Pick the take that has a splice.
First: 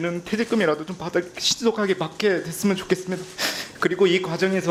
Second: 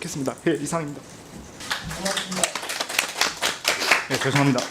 second; 1 cut; at 1.6 s

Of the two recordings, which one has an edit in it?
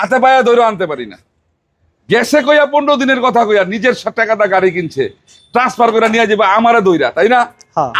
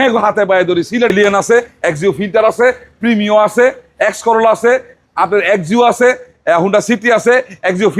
second; 1 cut; at 1.1 s

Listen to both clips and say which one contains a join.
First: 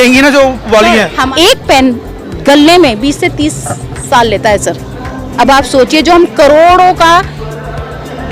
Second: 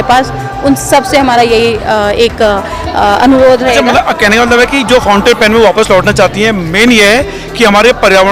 first; 1 cut; at 1.3 s

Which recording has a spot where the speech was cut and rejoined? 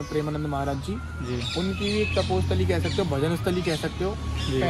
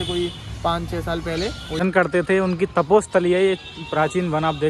second; 1 cut; at 1.8 s

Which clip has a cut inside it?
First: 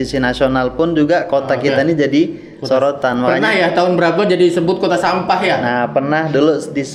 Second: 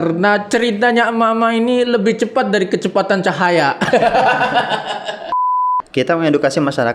second; 1 cut; at 5.6 s

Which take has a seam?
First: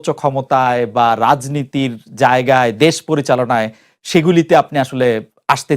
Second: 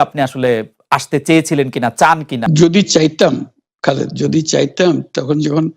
second; 1 cut; at 2.4 s

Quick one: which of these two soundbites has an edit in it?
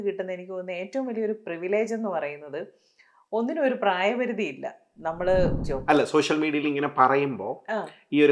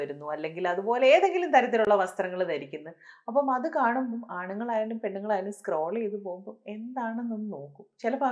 first; 1 cut; at 5.7 s

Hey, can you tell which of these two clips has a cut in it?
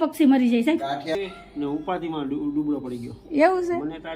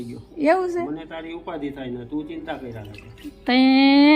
first; 1 cut; at 1.2 s

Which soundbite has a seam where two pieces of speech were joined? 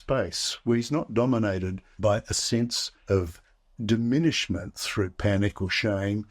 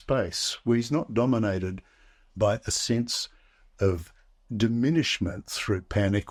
first; 2 cuts; at 1.8 s, 2.9 s

